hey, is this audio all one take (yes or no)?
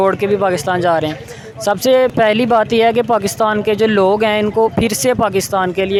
yes